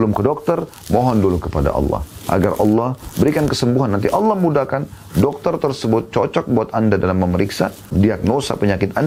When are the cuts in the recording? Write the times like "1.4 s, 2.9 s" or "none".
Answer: 7.9 s